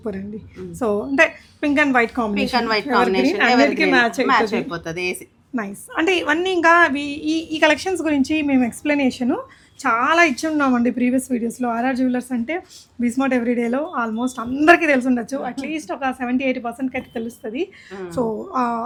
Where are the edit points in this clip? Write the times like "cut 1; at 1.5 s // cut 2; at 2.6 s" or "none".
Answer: none